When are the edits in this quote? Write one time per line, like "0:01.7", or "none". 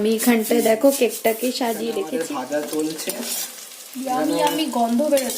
0:02.0